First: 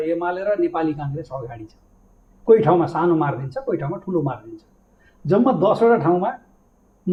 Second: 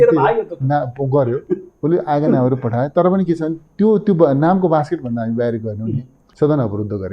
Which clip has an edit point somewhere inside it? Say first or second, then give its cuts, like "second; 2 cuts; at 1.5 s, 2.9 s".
second; 1 cut; at 6.2 s